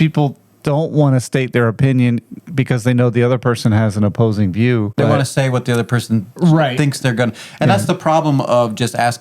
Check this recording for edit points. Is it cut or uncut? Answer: cut